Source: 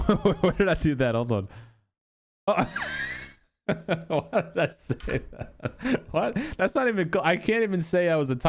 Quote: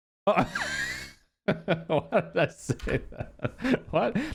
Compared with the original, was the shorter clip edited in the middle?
no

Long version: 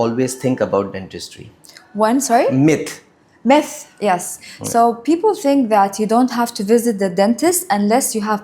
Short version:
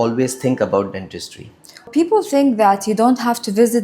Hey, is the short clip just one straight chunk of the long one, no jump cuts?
no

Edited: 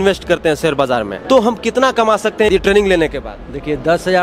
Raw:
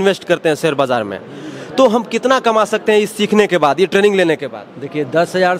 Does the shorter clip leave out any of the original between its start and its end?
yes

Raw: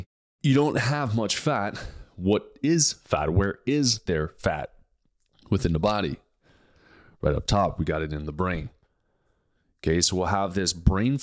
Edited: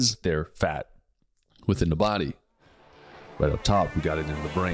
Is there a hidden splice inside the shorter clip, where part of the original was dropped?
no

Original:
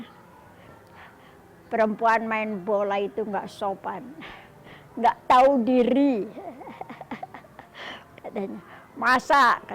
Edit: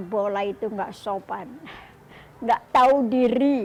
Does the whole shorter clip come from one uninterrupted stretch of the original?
yes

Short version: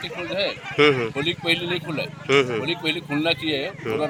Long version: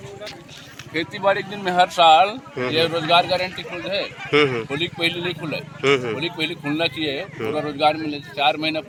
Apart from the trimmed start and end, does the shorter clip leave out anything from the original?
no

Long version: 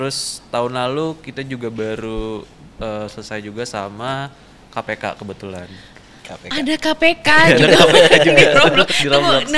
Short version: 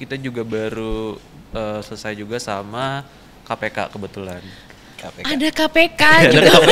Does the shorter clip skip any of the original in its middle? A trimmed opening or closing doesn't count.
no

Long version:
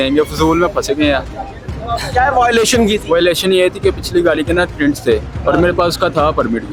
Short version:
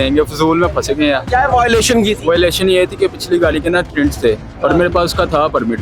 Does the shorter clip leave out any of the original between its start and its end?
yes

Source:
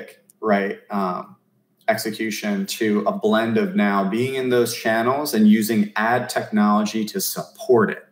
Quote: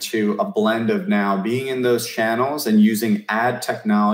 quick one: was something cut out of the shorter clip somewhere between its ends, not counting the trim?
no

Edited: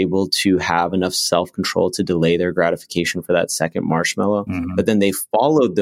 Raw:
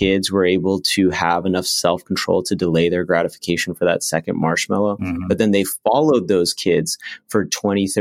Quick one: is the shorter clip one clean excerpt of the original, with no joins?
yes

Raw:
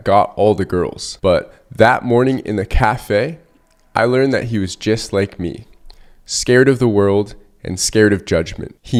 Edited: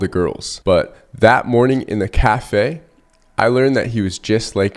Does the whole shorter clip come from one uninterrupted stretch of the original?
yes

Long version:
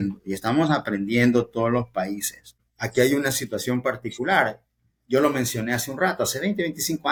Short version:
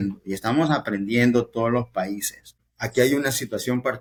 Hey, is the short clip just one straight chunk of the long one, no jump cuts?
yes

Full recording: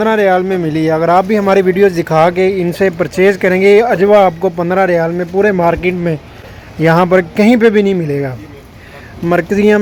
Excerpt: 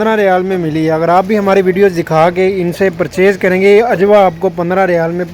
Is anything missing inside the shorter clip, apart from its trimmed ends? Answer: no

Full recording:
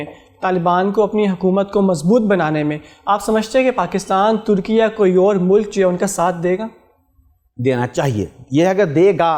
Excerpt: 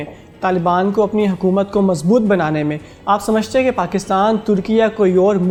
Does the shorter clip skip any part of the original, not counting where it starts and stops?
no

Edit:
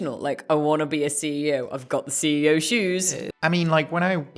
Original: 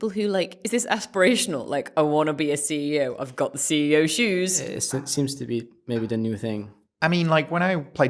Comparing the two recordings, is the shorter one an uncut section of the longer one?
no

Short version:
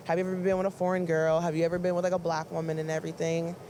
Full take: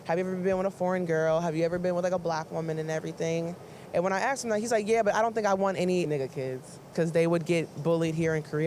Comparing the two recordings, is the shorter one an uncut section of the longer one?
yes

